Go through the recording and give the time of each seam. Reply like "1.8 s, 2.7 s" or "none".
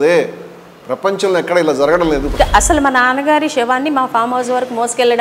2.3 s